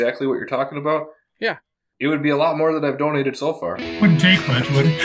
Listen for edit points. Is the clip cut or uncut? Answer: cut